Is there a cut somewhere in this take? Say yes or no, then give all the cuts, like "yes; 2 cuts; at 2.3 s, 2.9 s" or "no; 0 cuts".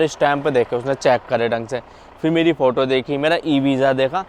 no; 0 cuts